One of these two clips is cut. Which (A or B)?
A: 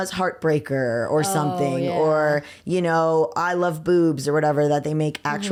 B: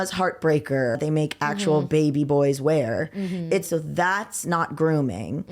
B